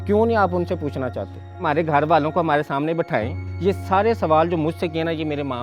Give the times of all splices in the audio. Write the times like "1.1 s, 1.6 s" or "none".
1.6 s, 3.4 s